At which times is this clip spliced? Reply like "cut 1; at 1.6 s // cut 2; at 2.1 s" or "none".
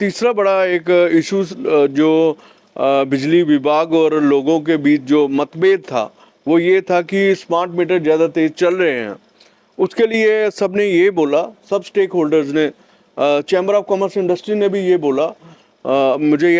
none